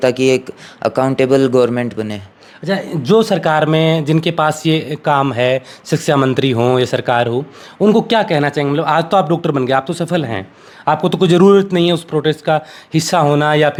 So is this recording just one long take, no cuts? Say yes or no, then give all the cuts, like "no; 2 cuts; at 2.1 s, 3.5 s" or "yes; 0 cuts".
yes; 0 cuts